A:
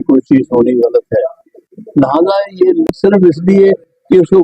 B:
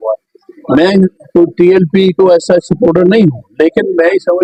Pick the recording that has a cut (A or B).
A